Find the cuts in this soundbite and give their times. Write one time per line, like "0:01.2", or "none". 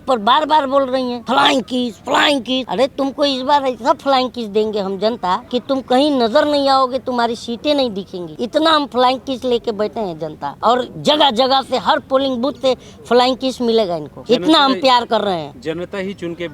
0:01.2
0:02.7
0:05.4
0:08.2
0:10.5
0:14.1